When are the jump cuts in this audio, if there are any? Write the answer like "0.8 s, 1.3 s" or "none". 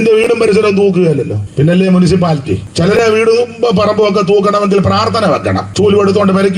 1.4 s, 2.7 s, 5.7 s